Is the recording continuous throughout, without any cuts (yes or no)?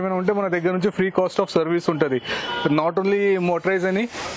yes